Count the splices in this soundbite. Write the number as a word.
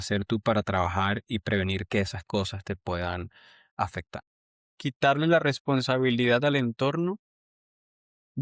one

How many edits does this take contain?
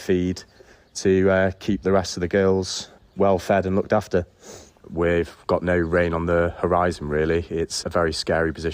two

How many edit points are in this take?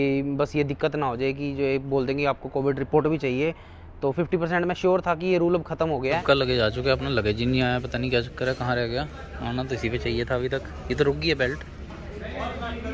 one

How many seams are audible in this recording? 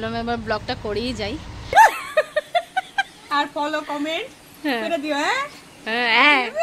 one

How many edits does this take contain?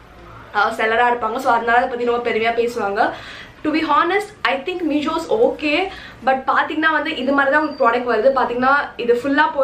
zero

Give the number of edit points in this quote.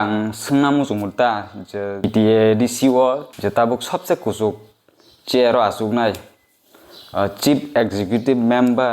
two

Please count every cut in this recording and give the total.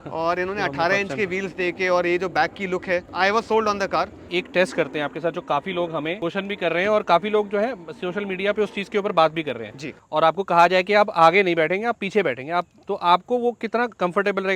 four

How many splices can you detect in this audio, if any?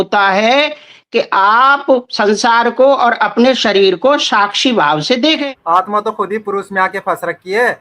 one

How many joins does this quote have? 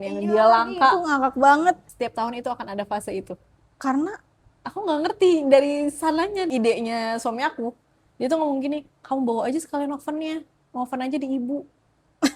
two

